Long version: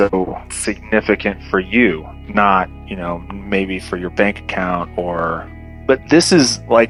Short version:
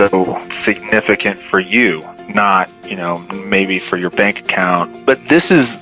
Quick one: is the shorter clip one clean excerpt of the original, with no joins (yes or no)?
no